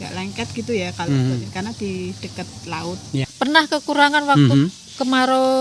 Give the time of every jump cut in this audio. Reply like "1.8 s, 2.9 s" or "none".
3.3 s